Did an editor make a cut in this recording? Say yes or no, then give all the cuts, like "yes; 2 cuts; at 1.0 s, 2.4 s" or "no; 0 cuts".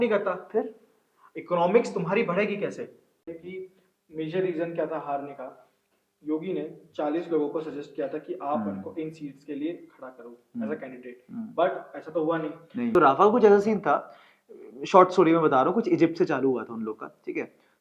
yes; 2 cuts; at 3.3 s, 12.9 s